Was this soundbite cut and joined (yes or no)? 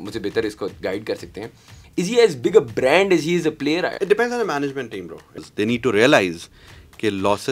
yes